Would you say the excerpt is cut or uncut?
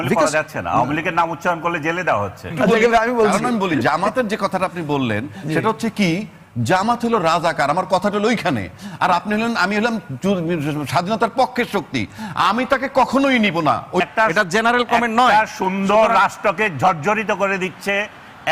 cut